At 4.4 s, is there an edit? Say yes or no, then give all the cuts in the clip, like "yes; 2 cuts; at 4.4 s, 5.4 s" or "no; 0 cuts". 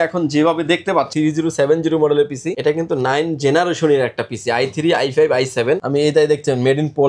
no; 3 cuts; at 1.1 s, 2.4 s, 5.8 s